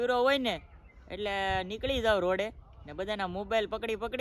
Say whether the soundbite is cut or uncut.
uncut